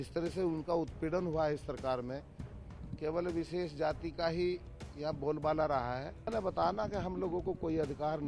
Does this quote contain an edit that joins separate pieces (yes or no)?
yes